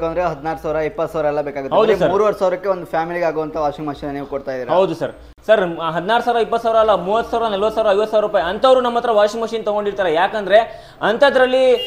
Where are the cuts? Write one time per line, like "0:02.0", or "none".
none